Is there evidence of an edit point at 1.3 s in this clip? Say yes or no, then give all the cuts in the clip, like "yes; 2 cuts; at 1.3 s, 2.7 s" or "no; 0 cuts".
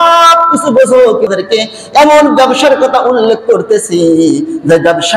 yes; 1 cut; at 1.3 s